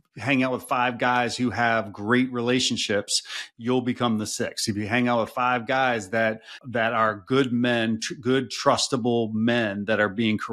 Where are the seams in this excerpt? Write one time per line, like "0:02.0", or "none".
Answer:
0:06.6